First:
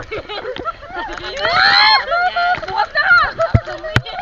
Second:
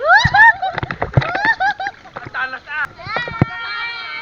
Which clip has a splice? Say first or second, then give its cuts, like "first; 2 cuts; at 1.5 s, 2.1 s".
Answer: second; 1 cut; at 2.9 s